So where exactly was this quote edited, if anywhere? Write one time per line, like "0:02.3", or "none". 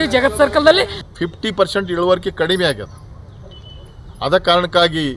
0:01.0